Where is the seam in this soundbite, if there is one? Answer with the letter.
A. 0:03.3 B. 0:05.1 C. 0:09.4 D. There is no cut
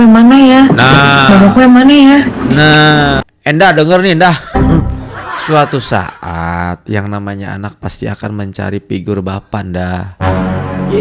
A